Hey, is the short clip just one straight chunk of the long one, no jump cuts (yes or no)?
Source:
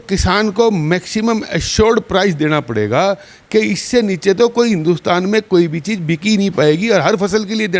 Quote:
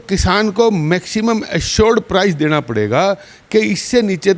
yes